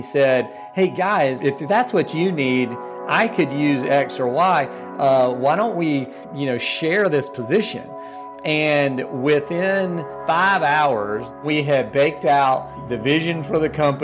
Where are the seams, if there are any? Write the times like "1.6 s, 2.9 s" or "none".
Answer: 1.4 s, 6.2 s, 10.1 s, 11.4 s, 12.8 s